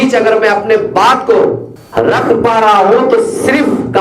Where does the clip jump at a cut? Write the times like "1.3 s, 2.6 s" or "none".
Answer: 1.7 s

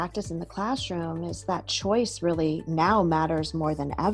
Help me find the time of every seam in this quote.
none

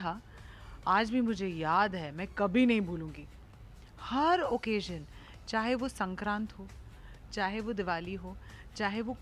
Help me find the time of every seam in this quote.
none

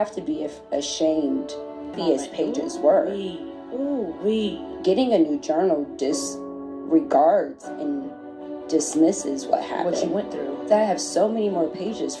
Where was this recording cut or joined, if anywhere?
1.9 s

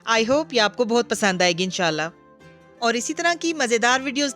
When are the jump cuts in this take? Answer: 2.2 s

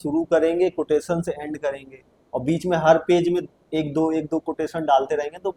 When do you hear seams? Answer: none

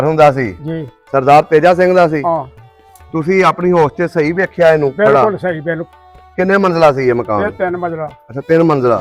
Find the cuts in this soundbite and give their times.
none

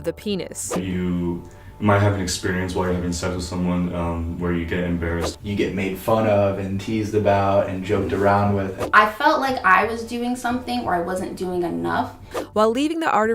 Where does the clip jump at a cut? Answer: 0.8 s, 5.3 s, 8.8 s, 12.4 s

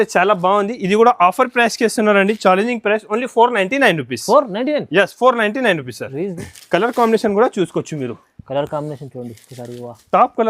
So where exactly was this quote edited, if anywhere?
6.3 s

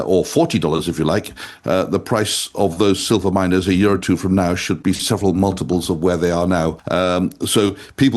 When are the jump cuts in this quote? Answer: 6.8 s

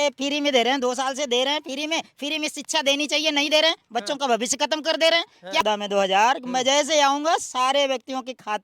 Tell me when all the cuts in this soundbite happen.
5.6 s

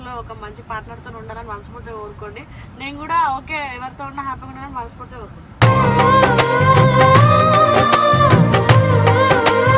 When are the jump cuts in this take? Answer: none

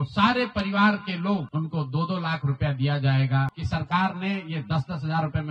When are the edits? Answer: 3.6 s

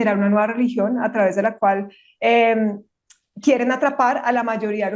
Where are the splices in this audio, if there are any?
none

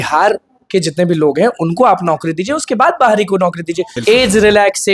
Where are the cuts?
3.9 s

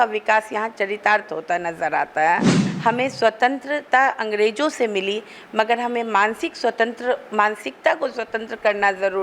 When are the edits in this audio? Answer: 2.6 s

